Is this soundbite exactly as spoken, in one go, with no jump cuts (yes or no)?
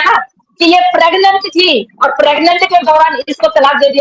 yes